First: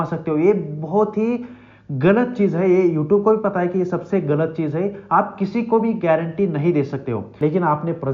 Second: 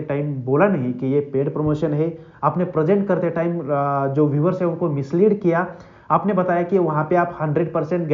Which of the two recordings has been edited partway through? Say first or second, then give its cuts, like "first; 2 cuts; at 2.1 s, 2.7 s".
first; 1 cut; at 7.2 s